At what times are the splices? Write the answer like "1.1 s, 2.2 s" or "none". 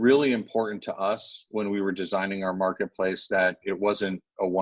none